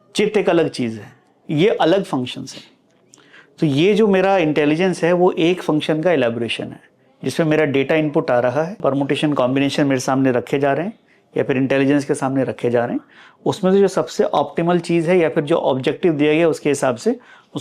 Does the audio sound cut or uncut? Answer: cut